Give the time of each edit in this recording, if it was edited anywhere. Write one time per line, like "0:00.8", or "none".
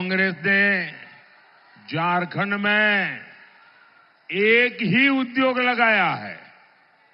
none